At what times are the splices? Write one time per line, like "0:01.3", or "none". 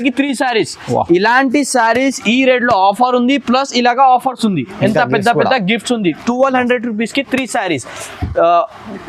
none